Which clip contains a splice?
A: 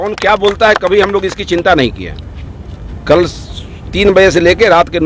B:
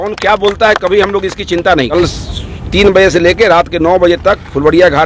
B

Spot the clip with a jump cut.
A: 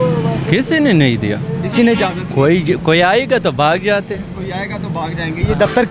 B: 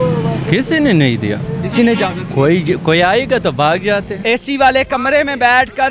B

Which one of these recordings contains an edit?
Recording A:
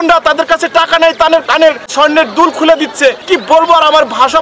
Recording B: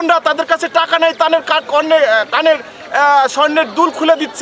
A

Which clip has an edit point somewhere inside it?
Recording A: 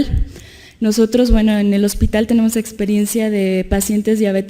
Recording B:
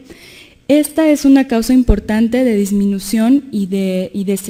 A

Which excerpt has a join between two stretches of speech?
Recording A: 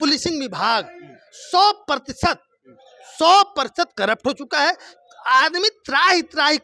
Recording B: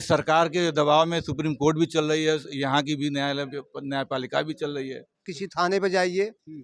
B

